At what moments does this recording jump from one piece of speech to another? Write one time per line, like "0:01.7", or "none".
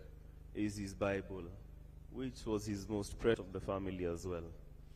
0:03.4

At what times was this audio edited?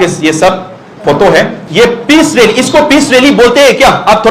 0:01.6

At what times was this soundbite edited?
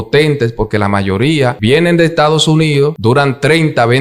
0:01.6
0:03.0

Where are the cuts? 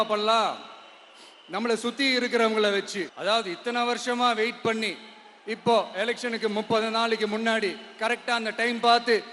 0:03.1

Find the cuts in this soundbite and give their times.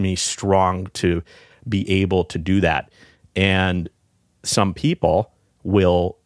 none

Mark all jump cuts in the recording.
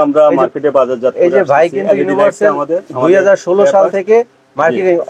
none

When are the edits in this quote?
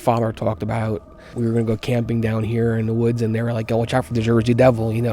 0:01.4

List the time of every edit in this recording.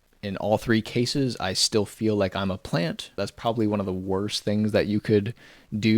0:03.1

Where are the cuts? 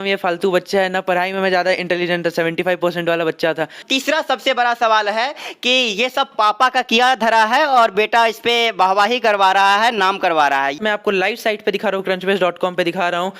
0:03.8
0:10.8

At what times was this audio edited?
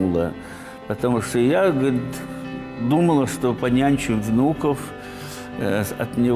none

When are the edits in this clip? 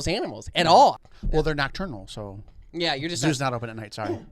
0:01.0

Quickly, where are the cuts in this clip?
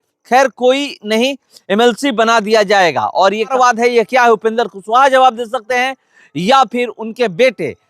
0:03.5

